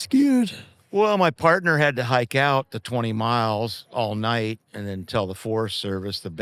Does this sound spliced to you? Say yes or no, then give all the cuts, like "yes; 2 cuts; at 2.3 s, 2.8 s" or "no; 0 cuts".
no; 0 cuts